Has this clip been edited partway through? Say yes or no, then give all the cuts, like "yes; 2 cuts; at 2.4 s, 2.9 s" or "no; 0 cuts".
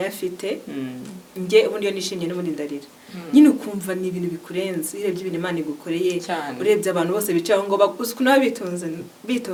no; 0 cuts